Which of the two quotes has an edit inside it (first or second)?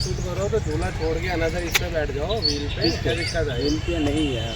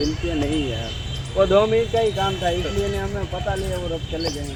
first